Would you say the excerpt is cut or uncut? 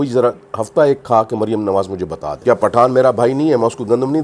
cut